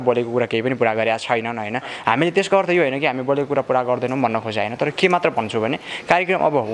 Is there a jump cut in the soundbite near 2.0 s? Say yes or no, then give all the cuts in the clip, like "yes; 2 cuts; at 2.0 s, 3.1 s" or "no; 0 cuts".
no; 0 cuts